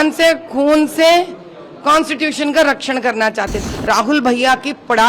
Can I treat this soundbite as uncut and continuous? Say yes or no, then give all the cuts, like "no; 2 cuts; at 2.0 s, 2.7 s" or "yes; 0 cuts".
no; 1 cut; at 3.6 s